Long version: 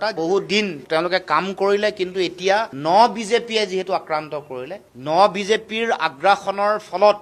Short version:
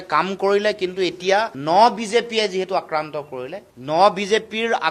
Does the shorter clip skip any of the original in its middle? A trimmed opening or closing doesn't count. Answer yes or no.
no